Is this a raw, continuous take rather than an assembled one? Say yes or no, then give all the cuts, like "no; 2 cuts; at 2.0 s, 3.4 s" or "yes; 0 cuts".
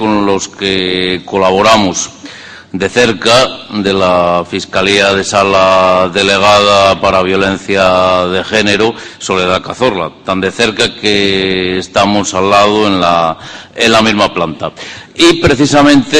no; 1 cut; at 7.0 s